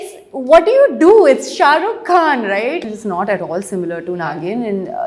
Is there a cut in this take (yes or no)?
yes